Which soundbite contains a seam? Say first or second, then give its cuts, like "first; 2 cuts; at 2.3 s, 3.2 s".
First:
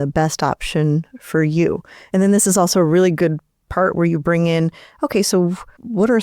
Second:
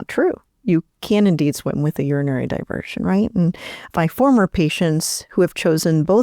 second; 1 cut; at 3.8 s